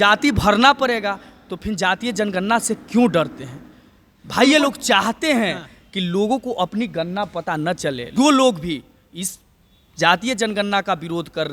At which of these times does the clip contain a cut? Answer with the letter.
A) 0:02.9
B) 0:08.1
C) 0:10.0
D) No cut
B